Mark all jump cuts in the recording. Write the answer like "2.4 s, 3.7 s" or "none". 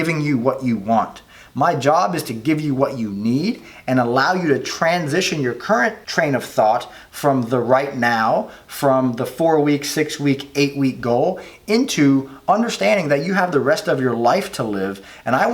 6.0 s